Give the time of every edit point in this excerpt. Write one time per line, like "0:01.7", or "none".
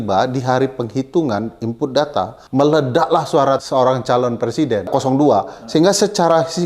0:02.4
0:03.6
0:04.9